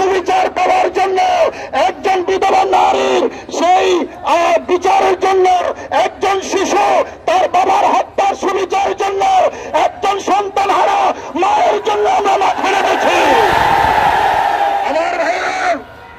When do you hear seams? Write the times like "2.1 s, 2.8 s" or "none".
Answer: none